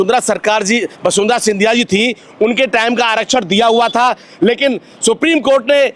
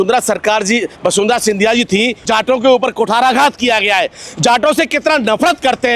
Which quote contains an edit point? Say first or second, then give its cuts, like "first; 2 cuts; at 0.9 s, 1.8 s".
second; 1 cut; at 2.2 s